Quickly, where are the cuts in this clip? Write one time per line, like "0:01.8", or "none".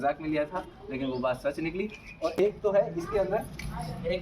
0:02.3

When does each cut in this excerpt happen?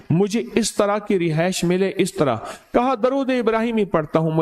none

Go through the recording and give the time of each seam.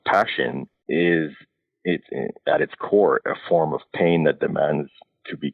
none

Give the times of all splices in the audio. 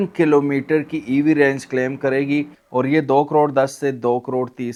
none

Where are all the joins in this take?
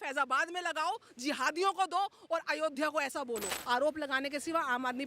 0:03.5

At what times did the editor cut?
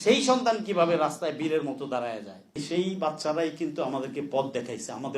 0:02.6

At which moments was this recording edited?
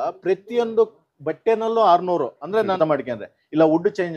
0:02.7

